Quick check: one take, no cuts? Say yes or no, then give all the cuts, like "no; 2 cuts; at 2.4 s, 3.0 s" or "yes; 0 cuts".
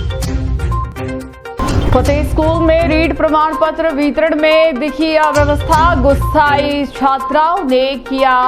yes; 0 cuts